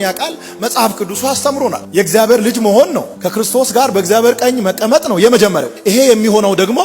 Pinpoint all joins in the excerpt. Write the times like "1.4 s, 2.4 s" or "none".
1.8 s